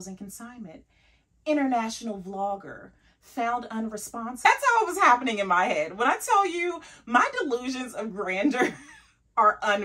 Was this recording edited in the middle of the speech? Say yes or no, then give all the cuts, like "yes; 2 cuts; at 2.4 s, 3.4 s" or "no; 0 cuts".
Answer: yes; 1 cut; at 4.4 s